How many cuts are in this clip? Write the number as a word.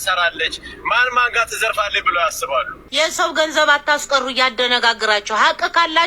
one